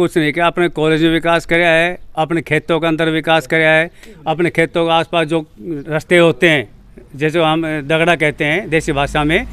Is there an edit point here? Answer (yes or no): no